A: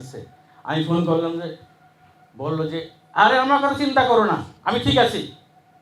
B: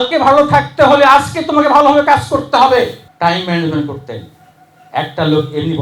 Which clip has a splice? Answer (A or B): B